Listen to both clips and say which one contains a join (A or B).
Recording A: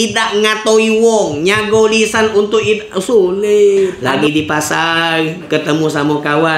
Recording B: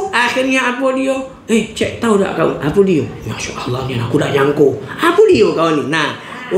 A